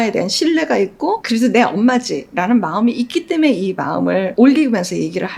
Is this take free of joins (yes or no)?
yes